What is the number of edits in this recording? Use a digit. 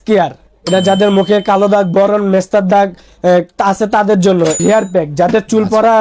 1